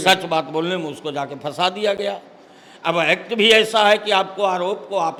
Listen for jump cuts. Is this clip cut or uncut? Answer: uncut